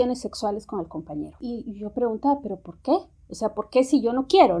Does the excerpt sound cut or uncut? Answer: uncut